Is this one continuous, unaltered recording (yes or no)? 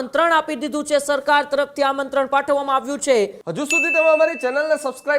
no